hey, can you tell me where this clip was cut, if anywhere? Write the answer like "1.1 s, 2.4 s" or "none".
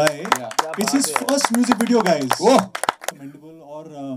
3.0 s